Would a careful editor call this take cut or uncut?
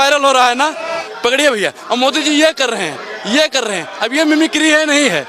cut